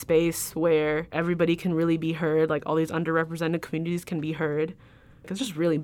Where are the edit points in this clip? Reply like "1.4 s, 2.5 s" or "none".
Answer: 1.2 s